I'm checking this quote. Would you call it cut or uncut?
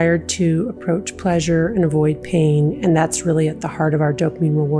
uncut